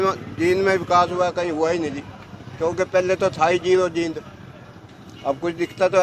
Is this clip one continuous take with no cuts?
yes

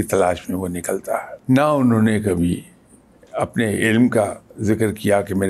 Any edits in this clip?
yes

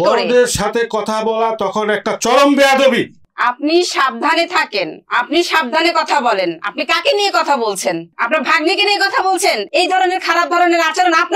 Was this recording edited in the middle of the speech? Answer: no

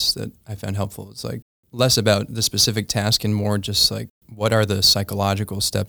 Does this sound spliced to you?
yes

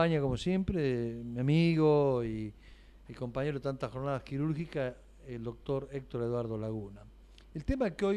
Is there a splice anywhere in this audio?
no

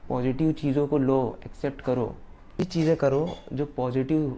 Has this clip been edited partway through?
yes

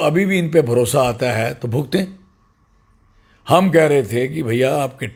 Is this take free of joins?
yes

